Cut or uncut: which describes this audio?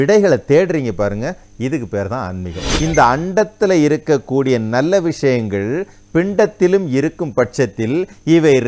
cut